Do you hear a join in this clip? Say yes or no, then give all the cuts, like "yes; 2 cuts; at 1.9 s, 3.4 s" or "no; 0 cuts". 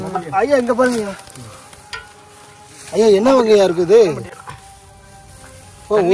no; 0 cuts